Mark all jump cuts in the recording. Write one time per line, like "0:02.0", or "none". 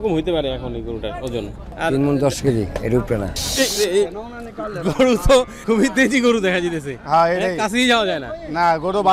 0:01.6
0:03.4
0:05.5